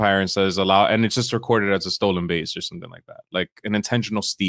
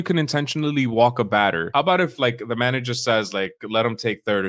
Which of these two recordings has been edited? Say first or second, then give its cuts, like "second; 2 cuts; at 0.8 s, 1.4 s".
second; 1 cut; at 1.7 s